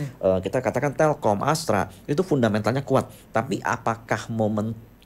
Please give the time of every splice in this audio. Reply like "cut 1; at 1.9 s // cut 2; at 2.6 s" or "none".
none

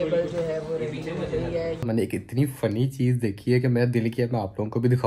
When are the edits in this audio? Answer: cut 1; at 1.8 s

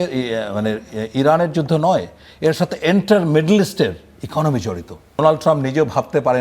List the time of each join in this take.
cut 1; at 5.2 s

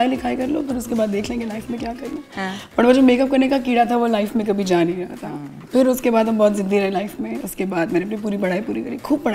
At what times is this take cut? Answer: none

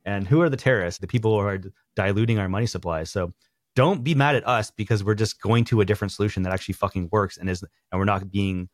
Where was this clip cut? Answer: cut 1; at 1.0 s

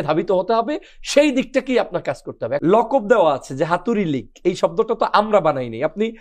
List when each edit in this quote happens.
cut 1; at 2.5 s

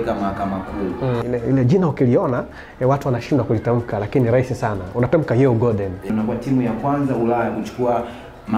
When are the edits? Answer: cut 1; at 1.2 s // cut 2; at 6.1 s

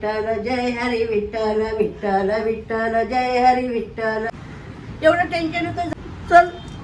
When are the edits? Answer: cut 1; at 4.3 s // cut 2; at 5.9 s

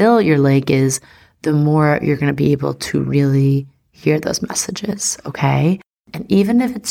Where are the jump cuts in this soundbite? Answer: none

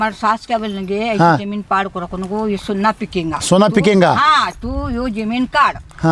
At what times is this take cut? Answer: cut 1; at 3.4 s

